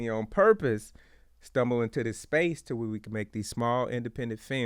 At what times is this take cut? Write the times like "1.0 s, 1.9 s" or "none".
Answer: none